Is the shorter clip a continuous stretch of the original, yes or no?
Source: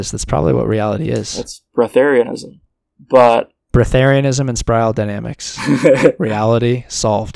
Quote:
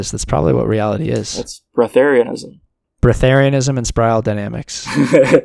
no